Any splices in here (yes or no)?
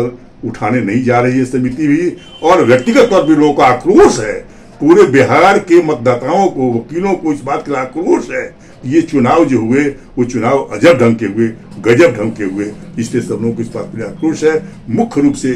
no